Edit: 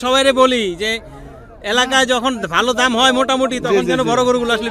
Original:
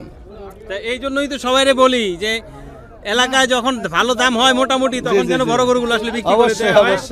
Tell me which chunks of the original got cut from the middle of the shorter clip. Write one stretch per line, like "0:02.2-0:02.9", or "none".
none